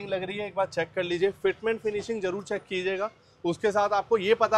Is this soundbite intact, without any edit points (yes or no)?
yes